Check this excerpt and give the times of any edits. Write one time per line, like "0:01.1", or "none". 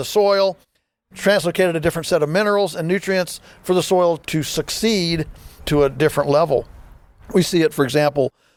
none